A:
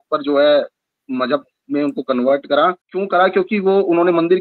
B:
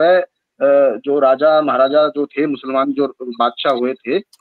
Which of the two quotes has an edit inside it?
A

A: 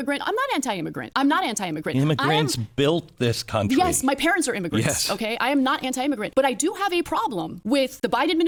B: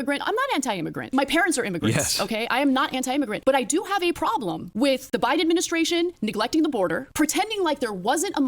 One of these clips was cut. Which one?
B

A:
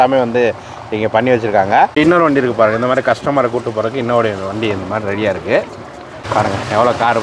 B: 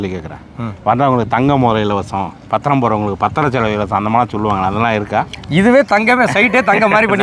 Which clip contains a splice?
A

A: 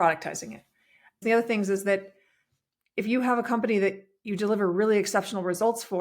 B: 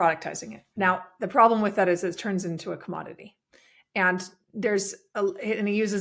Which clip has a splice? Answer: A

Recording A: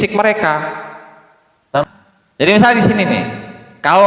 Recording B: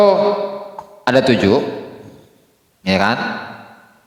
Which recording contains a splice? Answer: A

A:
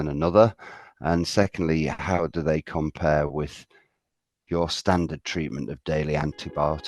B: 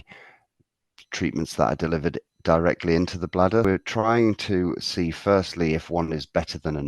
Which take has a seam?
B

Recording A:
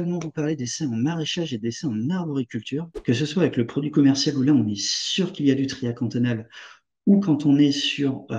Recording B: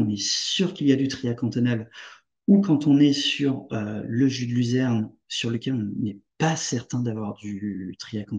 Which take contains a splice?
A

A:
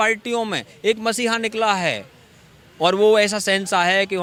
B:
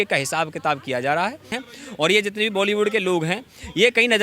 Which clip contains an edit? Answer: B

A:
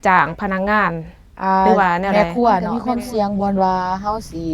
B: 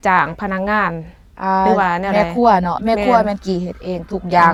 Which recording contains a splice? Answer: A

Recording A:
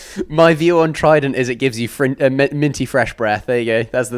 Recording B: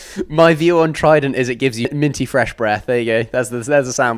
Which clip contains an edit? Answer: B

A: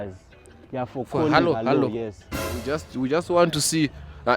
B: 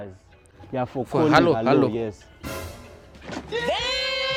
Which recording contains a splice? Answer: A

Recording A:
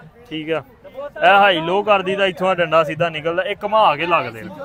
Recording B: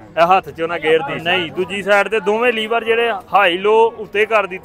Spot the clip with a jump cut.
B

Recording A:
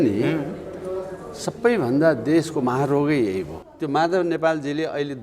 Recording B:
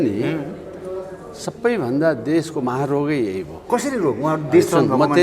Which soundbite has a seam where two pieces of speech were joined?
A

